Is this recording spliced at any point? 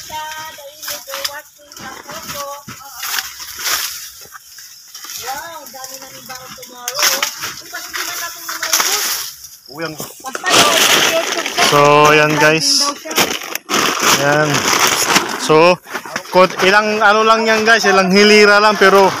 yes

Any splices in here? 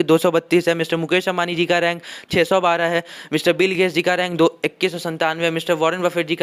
no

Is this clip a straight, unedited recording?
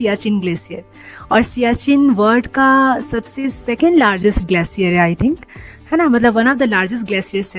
yes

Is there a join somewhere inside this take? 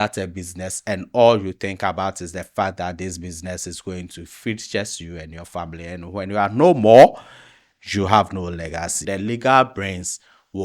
yes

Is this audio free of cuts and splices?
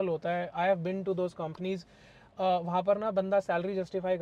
yes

